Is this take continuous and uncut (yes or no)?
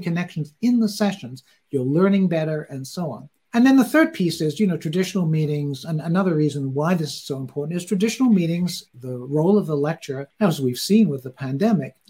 yes